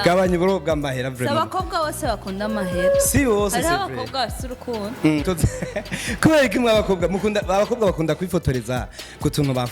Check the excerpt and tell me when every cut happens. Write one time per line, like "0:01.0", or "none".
0:05.2